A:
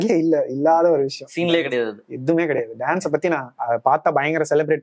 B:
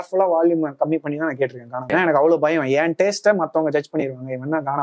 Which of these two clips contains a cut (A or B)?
B